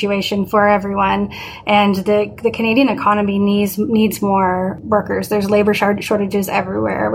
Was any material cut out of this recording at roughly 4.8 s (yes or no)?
yes